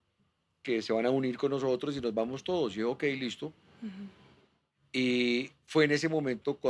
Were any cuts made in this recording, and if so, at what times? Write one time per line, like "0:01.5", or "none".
none